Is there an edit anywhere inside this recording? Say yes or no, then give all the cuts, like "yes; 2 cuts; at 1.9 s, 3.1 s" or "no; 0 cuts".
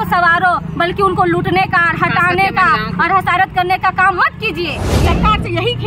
yes; 1 cut; at 4.8 s